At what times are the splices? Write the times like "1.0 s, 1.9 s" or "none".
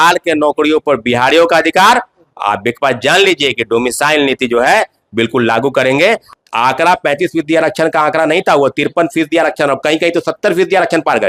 6.4 s